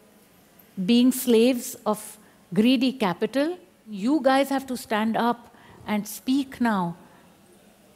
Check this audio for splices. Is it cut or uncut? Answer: cut